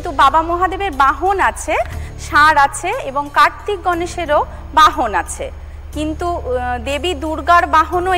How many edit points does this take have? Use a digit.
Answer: 0